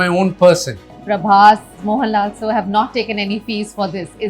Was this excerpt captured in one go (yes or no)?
no